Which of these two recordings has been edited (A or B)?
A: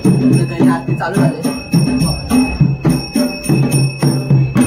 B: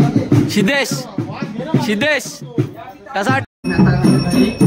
B